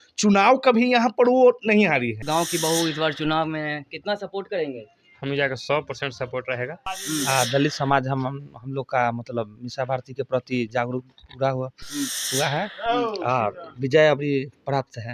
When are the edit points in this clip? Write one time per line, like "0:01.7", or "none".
0:02.2
0:06.9